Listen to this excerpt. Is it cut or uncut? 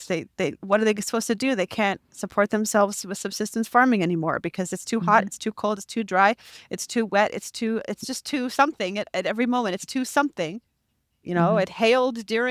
uncut